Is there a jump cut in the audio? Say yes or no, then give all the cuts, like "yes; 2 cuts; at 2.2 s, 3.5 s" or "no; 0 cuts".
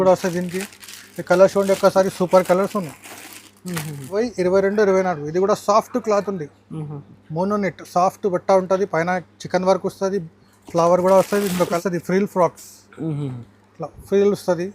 yes; 2 cuts; at 4.2 s, 11.7 s